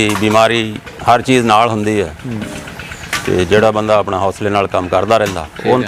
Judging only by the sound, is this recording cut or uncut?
uncut